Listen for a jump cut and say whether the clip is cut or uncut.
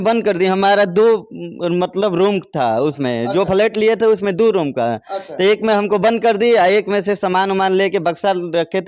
uncut